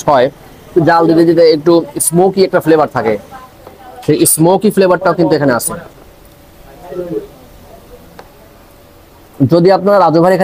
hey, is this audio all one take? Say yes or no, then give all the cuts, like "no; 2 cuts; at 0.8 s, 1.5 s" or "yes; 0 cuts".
no; 1 cut; at 9.2 s